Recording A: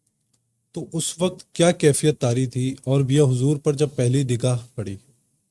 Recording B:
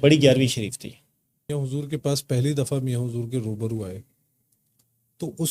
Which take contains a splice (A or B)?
B